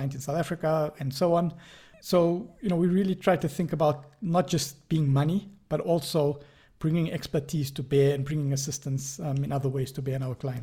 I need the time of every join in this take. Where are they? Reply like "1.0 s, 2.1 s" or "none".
none